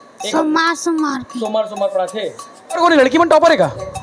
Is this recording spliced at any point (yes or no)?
yes